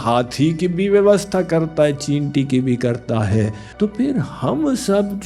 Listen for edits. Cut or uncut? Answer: cut